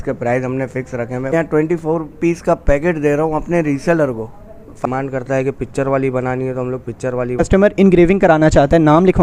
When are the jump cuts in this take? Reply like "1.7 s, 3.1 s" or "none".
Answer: 1.3 s, 4.9 s, 7.5 s

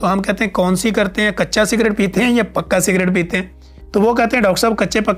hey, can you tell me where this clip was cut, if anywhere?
none

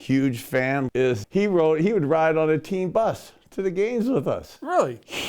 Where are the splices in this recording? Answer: 1.0 s

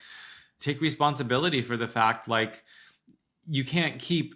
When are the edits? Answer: none

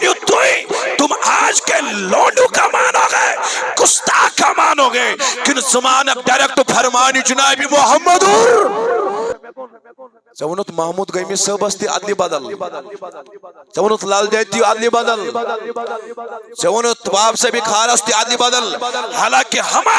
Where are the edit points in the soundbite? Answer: 9.3 s

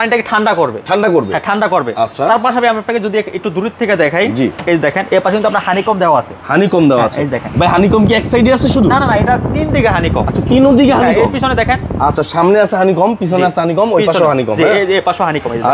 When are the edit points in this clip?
none

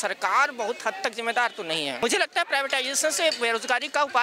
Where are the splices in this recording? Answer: 2.0 s

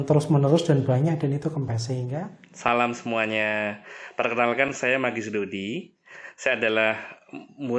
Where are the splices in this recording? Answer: 2.1 s

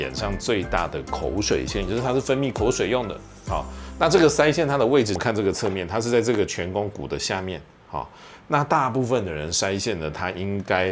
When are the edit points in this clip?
5.1 s

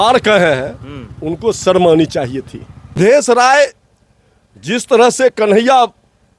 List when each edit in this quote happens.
3.0 s

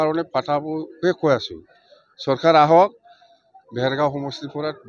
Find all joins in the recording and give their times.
none

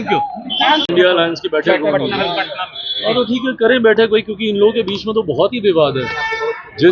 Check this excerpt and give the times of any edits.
0.9 s

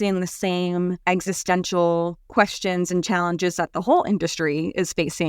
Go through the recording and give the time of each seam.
1.0 s, 2.2 s

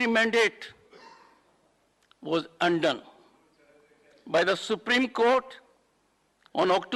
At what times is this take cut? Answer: none

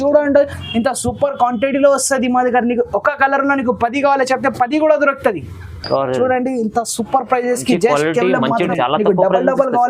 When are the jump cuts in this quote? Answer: 5.8 s, 8.7 s

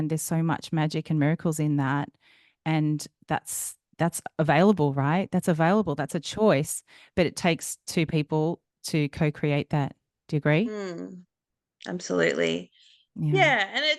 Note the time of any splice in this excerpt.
none

